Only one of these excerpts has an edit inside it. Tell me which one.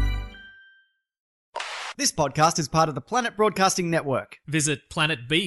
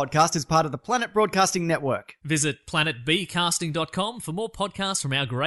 first; 1 cut; at 1.3 s

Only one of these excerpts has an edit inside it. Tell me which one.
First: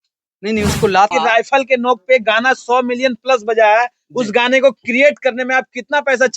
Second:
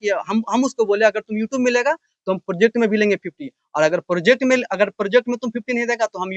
first; 1 cut; at 1.1 s

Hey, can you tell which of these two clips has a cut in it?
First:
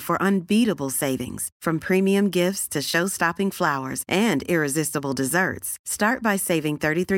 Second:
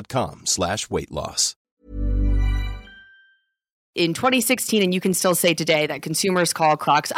second; 2 cuts; at 1.6 s, 3.8 s

